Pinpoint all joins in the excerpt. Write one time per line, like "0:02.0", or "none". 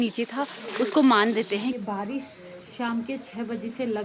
0:01.8